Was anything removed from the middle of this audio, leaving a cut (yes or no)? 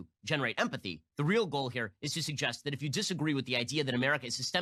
no